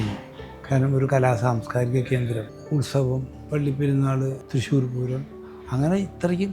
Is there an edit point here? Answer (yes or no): yes